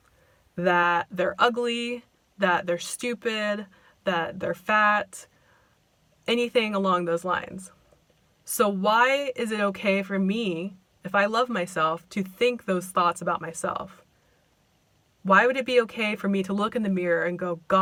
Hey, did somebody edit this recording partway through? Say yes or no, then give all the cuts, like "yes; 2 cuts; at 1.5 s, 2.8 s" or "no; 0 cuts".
no; 0 cuts